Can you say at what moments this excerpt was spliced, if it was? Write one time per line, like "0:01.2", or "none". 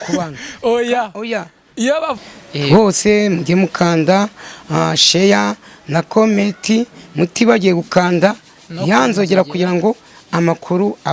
0:02.3